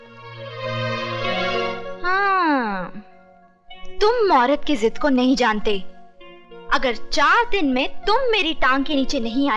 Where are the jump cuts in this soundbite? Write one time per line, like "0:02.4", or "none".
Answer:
none